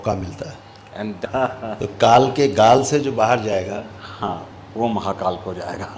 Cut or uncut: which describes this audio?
cut